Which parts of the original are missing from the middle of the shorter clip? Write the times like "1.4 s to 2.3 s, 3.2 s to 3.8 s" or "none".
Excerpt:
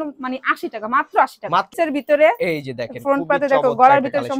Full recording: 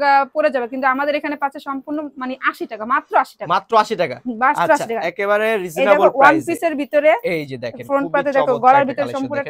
3.7 s to 6.6 s